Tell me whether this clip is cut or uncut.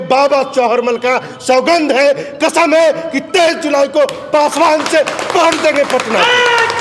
uncut